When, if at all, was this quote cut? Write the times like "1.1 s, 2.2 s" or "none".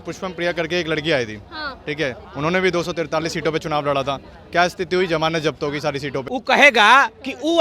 6.3 s